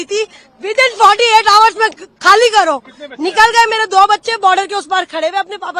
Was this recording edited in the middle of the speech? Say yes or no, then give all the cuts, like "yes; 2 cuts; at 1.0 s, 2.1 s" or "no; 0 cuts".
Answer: no; 0 cuts